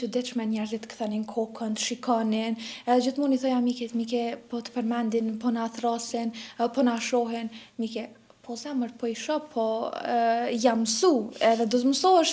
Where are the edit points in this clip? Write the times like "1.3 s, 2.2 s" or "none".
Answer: none